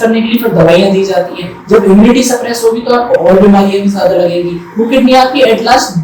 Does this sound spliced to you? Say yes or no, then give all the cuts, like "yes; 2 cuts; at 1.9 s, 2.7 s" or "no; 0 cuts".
no; 0 cuts